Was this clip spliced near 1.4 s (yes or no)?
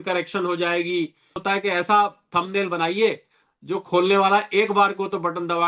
yes